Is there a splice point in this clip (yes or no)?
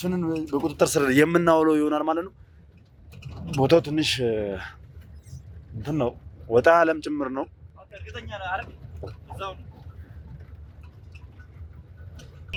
no